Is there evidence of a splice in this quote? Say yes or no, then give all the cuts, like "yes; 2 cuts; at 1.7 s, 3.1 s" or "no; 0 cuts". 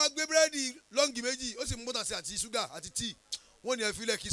no; 0 cuts